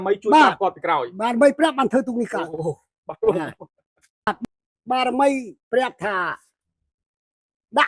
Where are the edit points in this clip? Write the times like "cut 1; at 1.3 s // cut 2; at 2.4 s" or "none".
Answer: cut 1; at 4.4 s